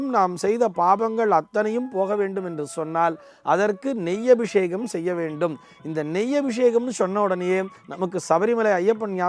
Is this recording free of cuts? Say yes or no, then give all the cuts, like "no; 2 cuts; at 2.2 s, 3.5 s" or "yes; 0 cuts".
yes; 0 cuts